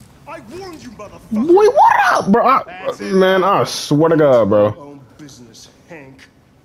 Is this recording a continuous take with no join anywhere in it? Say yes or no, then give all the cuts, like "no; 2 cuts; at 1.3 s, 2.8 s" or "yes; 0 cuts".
yes; 0 cuts